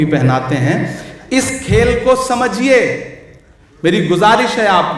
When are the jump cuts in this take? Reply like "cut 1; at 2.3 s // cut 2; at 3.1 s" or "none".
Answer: none